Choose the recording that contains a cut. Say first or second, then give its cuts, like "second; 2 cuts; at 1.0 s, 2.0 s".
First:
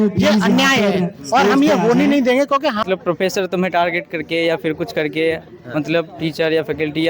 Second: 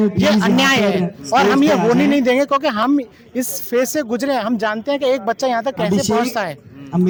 first; 1 cut; at 2.8 s